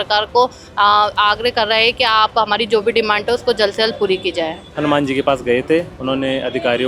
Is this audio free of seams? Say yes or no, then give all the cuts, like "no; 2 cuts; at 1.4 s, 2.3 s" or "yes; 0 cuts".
no; 1 cut; at 4.6 s